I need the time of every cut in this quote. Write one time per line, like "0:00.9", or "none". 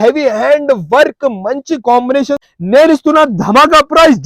0:02.4